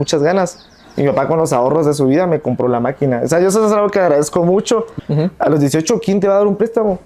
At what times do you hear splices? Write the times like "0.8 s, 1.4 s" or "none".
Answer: 4.9 s